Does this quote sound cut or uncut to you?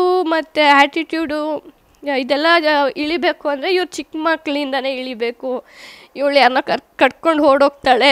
uncut